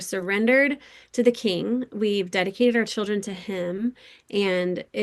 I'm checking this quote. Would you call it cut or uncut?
uncut